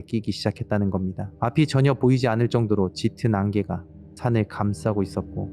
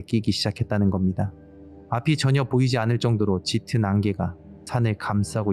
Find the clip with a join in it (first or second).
first